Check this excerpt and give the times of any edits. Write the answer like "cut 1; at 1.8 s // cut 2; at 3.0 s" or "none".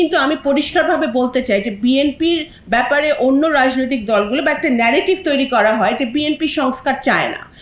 none